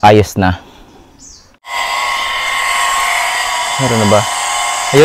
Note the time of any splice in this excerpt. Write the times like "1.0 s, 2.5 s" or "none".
1.7 s